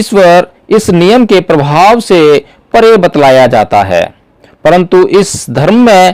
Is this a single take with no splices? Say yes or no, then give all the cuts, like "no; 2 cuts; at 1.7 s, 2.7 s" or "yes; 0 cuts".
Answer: yes; 0 cuts